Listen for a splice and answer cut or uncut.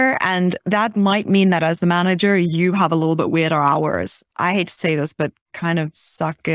cut